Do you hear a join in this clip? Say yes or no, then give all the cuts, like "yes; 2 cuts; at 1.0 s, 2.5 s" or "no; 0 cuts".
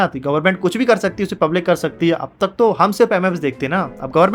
no; 0 cuts